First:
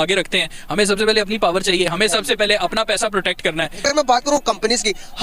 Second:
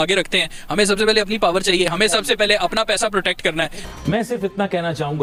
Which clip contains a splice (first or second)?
first